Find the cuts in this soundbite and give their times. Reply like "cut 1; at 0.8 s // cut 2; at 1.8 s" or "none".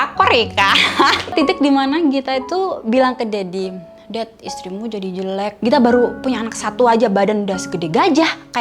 cut 1; at 1.3 s // cut 2; at 5.5 s